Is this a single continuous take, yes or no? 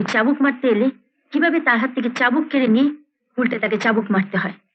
yes